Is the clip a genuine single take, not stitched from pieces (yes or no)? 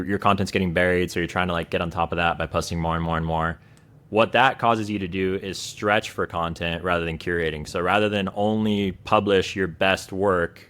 yes